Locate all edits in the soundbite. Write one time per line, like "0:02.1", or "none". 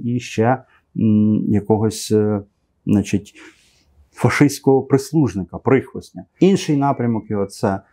none